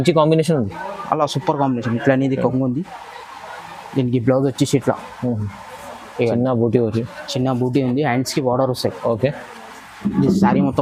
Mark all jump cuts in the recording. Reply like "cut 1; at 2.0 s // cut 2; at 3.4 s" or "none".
none